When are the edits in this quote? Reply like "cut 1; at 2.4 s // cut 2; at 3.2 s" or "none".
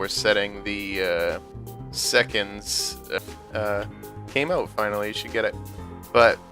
none